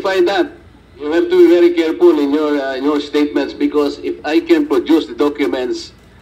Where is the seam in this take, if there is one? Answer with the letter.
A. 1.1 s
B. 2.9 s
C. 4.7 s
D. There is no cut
A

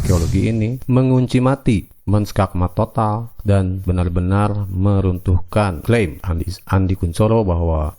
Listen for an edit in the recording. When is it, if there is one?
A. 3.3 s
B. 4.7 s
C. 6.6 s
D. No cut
D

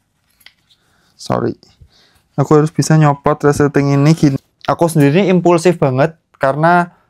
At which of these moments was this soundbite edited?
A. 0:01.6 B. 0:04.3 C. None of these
B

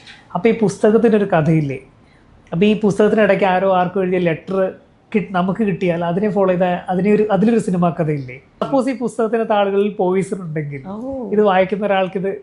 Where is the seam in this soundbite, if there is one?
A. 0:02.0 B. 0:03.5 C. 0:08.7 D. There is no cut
C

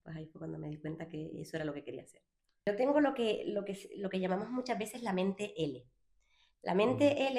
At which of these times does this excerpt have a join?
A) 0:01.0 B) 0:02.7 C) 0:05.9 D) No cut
B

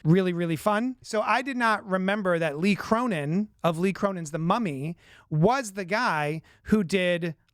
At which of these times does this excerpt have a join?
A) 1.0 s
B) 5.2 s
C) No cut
A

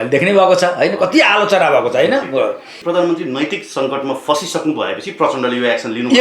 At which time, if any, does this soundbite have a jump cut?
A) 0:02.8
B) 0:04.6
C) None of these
A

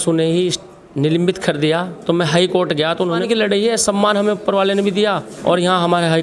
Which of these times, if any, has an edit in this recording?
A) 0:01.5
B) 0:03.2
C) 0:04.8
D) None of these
B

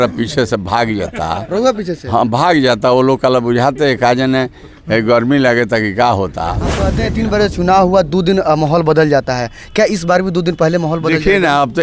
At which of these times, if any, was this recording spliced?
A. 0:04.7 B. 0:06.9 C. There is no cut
B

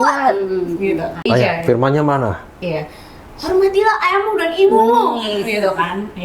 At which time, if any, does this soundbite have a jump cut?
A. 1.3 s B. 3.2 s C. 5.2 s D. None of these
A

